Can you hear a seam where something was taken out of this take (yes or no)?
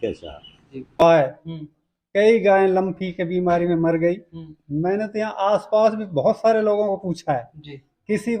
yes